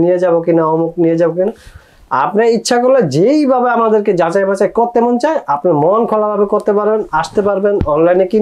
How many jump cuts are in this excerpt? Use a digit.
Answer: 0